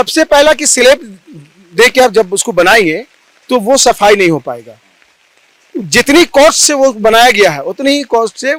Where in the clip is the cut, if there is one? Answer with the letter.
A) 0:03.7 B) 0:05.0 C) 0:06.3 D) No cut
D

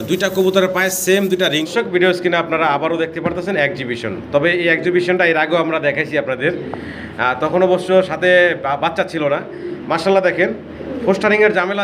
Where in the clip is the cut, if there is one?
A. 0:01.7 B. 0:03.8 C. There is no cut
A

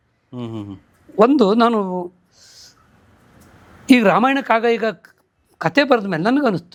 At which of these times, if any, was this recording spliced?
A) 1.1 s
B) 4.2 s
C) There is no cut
C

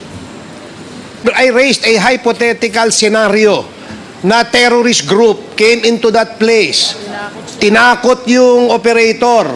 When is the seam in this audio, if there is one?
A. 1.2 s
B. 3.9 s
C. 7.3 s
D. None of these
A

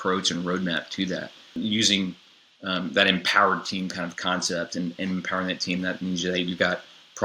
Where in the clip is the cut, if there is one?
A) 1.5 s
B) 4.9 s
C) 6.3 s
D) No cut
A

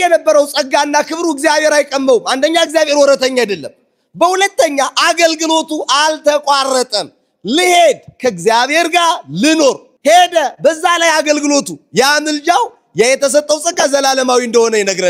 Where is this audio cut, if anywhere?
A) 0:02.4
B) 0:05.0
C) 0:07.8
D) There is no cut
D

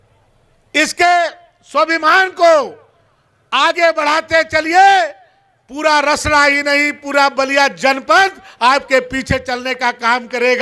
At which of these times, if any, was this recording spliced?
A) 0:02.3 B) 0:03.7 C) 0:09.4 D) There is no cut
D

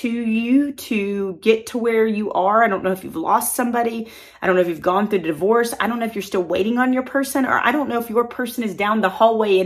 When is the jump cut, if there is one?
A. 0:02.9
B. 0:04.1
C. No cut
C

